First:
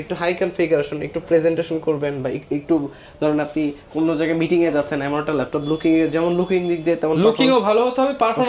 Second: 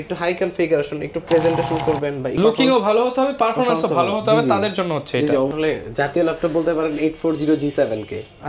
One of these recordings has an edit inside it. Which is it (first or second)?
second